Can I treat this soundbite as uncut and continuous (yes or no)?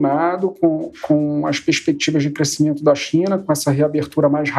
yes